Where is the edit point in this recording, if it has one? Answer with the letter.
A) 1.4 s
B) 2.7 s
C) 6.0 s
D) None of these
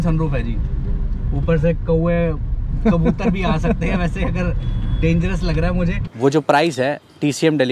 C